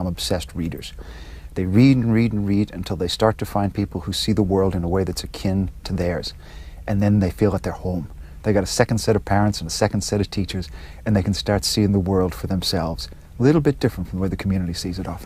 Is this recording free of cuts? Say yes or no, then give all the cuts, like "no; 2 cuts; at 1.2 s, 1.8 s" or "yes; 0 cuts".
no; 1 cut; at 13.5 s